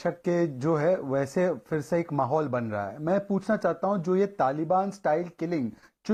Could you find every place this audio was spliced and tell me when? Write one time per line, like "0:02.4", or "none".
none